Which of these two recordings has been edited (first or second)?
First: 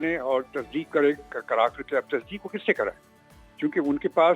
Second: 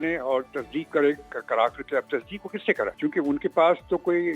second